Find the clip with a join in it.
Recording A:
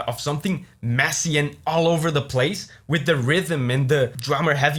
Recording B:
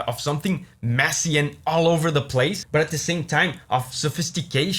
B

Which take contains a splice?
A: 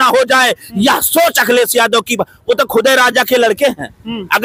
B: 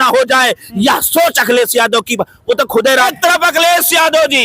B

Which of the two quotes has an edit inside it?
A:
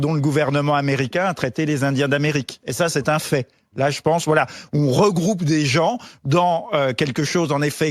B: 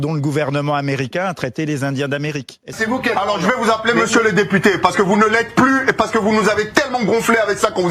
B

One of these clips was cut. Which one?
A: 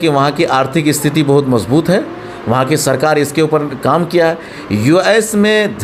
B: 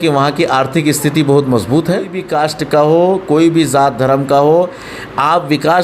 B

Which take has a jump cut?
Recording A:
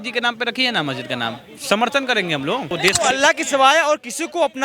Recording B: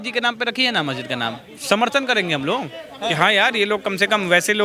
A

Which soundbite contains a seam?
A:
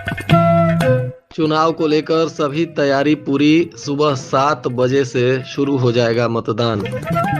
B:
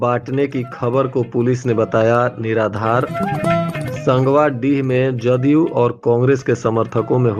A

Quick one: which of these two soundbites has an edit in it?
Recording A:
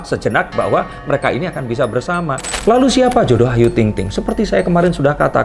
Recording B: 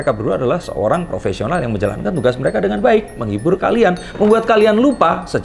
A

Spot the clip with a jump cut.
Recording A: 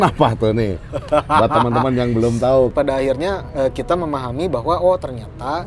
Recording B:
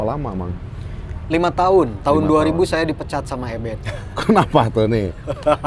A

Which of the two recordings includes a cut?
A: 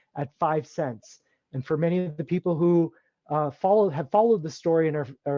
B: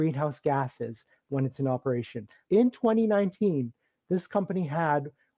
B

